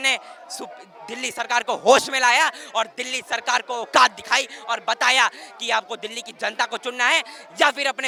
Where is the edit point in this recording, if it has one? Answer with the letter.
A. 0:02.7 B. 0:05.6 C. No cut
C